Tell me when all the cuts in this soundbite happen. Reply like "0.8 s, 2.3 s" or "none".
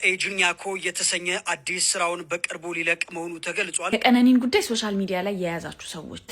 3.9 s

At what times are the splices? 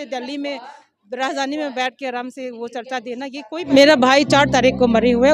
3.7 s

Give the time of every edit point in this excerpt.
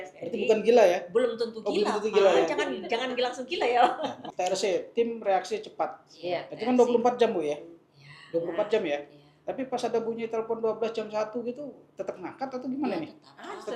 4.2 s

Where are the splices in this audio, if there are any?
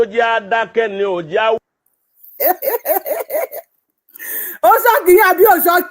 0.9 s

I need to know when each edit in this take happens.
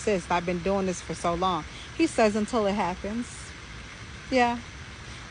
none

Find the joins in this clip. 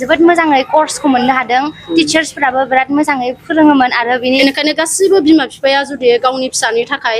4.4 s

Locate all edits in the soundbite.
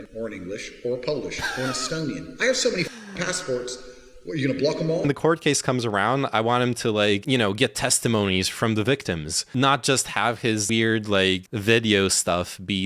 5.1 s, 7.2 s, 8.5 s, 9.4 s, 10.6 s, 11.5 s

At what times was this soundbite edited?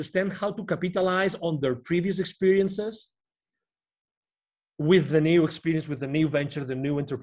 none

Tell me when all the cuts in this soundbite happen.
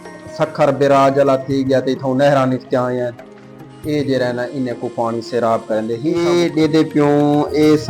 6.1 s

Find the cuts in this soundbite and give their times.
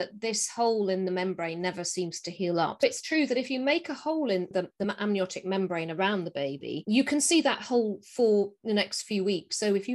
2.8 s, 4.5 s

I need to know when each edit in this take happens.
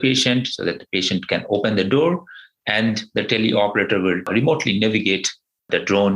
4.3 s

